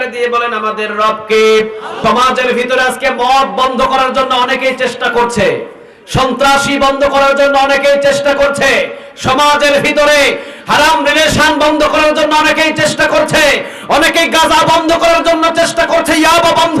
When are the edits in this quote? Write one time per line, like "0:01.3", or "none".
0:02.0